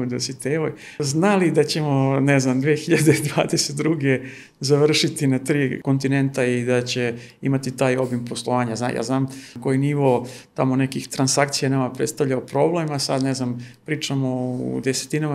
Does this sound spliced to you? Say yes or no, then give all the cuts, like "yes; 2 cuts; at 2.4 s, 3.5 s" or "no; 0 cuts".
yes; 3 cuts; at 1.0 s, 5.8 s, 9.5 s